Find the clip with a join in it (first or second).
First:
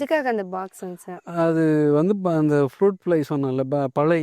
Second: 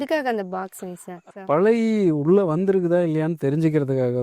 second